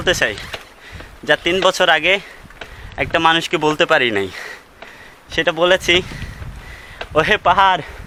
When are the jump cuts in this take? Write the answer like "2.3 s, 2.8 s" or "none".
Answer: none